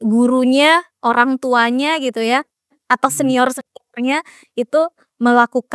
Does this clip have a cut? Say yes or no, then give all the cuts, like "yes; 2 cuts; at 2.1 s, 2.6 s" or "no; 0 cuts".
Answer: no; 0 cuts